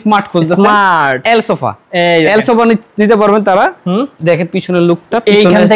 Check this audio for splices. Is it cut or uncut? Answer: uncut